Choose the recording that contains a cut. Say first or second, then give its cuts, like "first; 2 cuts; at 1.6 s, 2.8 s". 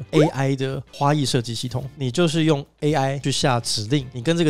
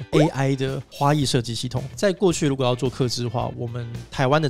first; 1 cut; at 1.9 s